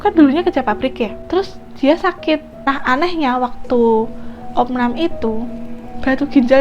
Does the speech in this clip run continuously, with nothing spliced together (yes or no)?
no